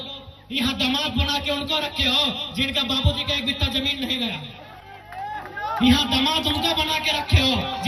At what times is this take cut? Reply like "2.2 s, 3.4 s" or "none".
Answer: none